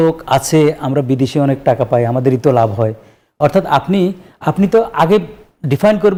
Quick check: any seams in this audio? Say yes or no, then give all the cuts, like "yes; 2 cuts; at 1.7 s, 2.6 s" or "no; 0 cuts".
no; 0 cuts